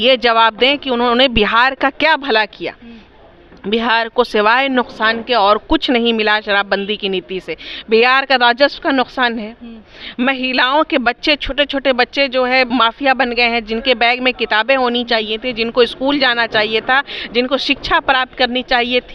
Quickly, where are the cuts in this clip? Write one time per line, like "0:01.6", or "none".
none